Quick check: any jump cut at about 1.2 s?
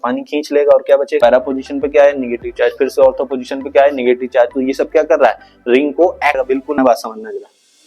yes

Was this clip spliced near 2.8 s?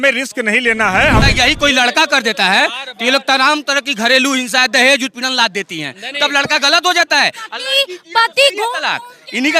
no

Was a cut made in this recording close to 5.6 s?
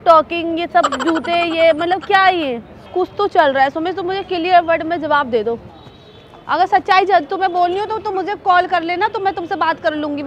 yes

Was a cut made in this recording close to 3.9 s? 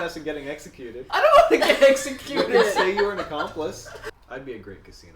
yes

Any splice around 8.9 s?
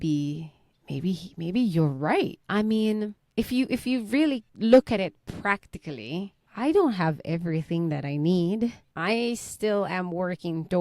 yes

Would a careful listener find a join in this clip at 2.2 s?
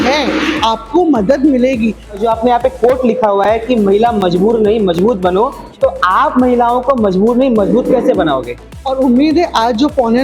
yes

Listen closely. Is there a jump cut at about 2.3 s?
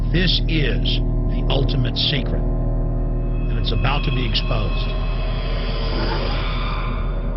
no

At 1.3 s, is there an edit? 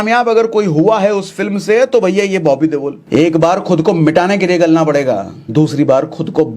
no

